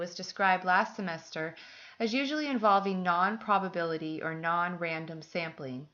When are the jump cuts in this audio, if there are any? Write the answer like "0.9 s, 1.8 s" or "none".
4.5 s